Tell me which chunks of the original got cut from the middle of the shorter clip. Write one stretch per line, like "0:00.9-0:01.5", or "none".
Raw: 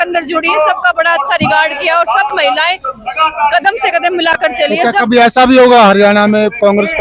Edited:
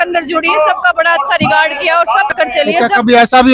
0:02.3-0:04.4